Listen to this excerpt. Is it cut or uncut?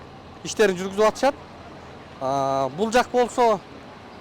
uncut